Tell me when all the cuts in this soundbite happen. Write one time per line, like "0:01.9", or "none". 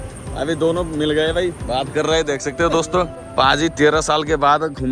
0:03.2